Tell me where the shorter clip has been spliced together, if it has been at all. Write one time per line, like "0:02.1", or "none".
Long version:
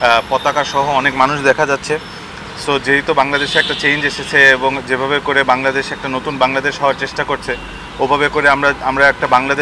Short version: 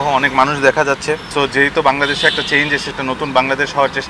0:01.2
0:02.9